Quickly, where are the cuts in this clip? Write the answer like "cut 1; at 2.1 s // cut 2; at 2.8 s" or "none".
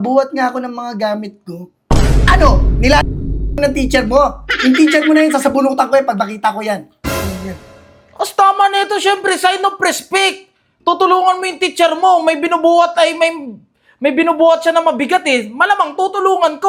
none